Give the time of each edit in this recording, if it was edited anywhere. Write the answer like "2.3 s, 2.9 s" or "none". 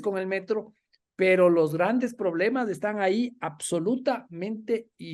none